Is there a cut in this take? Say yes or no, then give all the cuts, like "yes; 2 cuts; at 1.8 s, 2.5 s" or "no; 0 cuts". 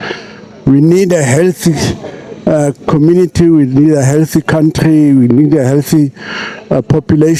no; 0 cuts